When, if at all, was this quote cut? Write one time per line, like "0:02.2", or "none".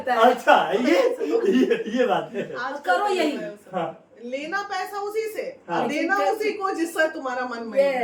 none